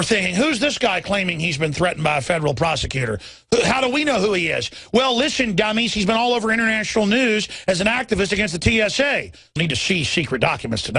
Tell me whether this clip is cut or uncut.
uncut